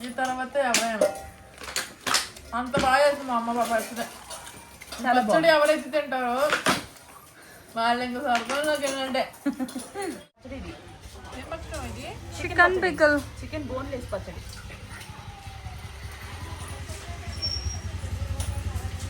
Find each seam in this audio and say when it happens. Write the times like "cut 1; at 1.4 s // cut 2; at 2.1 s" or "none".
cut 1; at 10.4 s